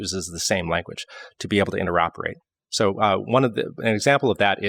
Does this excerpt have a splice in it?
no; 0 cuts

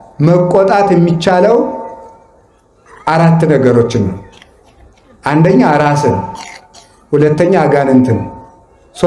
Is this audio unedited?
yes; 0 cuts

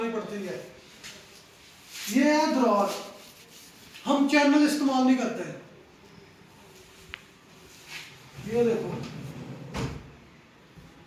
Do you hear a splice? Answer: no; 0 cuts

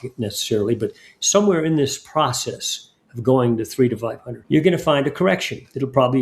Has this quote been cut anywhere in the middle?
yes; 1 cut; at 4.3 s

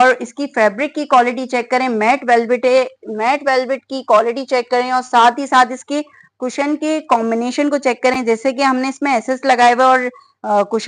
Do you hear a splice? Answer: no; 0 cuts

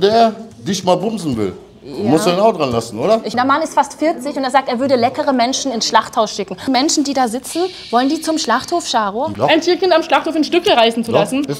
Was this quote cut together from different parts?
yes; 3 cuts; at 3.3 s, 6.7 s, 9.3 s

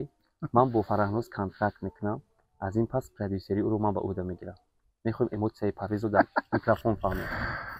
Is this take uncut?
yes; 0 cuts

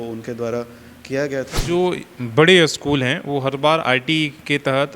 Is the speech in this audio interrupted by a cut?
yes; 1 cut; at 1.6 s

